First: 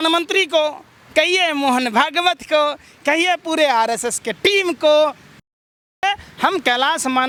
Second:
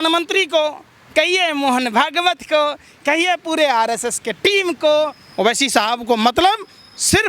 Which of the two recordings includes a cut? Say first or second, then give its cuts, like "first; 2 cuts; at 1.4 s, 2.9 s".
second; 1 cut; at 5.2 s